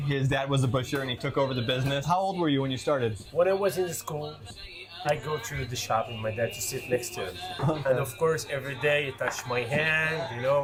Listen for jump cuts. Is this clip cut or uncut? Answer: uncut